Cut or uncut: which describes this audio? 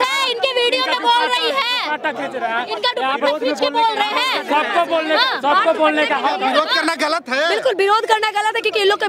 uncut